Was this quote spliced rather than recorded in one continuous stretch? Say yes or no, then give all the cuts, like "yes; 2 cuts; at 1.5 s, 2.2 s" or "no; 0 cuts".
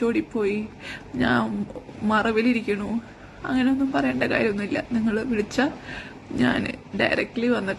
no; 0 cuts